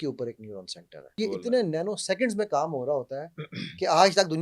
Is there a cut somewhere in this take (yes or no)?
yes